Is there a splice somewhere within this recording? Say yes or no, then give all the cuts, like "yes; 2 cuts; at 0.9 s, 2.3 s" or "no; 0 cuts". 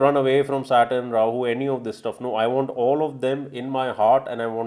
no; 0 cuts